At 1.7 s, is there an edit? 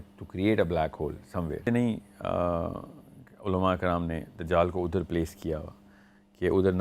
yes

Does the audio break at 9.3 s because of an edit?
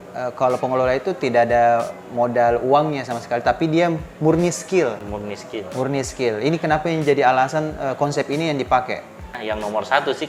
yes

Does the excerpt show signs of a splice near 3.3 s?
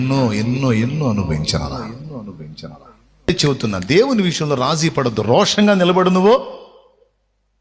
yes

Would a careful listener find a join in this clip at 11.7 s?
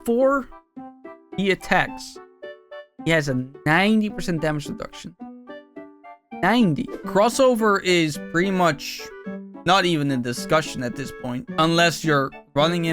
no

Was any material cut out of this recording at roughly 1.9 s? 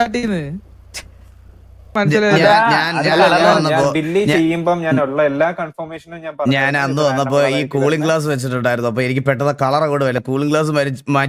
yes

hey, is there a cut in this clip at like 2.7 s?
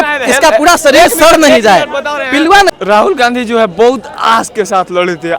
yes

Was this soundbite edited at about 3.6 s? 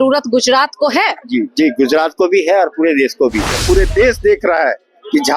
yes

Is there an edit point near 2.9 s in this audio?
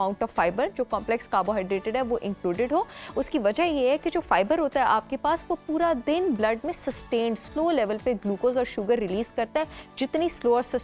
no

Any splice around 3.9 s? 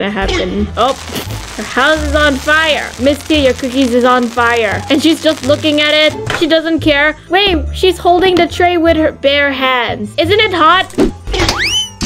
no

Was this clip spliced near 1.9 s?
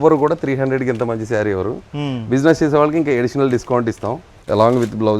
no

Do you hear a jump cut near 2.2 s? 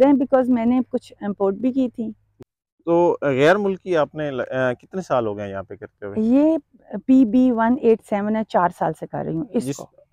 no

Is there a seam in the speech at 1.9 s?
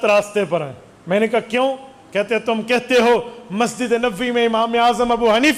no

